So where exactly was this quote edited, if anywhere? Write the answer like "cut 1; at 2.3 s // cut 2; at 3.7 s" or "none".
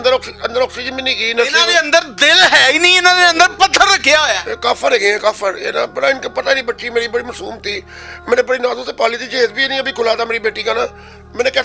none